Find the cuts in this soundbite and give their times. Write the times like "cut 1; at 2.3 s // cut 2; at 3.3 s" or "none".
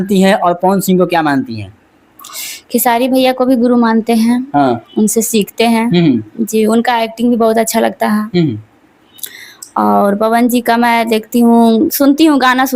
none